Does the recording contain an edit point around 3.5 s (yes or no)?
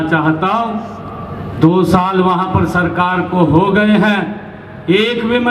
no